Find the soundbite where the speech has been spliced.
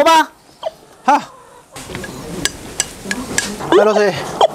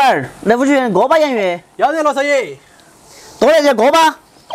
first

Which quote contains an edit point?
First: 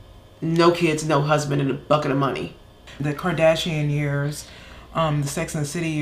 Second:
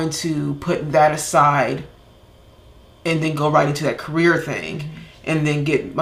first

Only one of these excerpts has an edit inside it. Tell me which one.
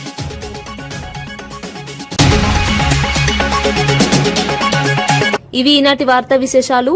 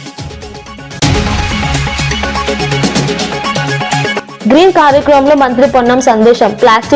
second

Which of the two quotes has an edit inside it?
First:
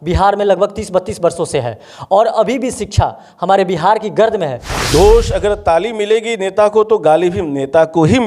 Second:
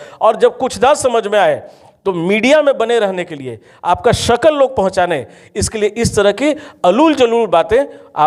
first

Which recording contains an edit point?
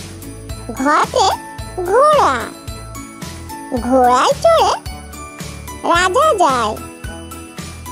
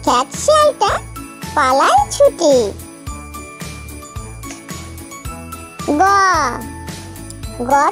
first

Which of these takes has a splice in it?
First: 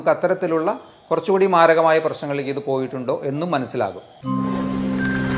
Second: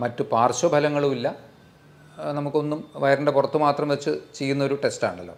first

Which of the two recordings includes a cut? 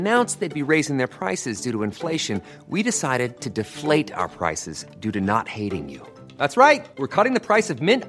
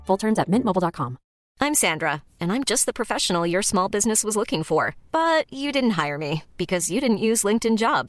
second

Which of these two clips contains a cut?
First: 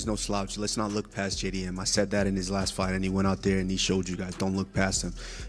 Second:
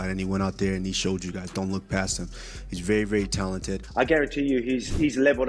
second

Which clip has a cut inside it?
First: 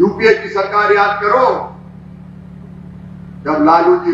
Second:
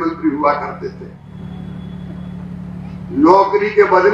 second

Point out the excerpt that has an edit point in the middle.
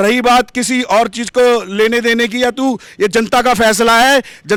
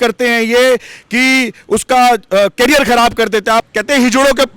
second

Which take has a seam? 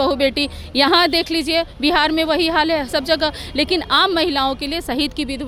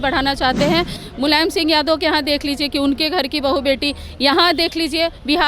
second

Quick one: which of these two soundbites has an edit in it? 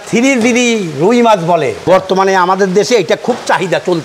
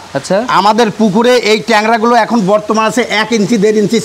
first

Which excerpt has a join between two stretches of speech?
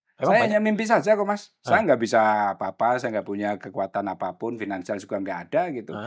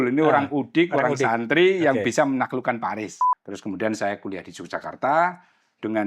second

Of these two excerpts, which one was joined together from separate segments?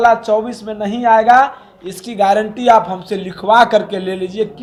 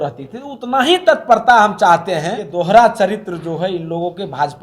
second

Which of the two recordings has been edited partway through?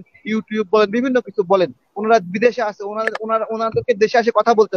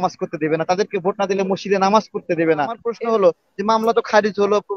second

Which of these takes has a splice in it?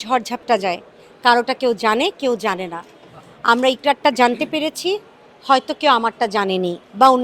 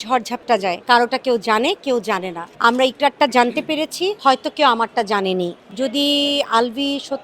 second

